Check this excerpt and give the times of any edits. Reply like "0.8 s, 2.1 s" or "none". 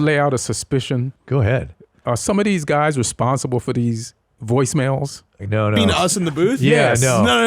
1.5 s, 5.4 s